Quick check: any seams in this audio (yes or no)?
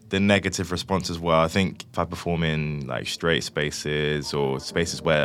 yes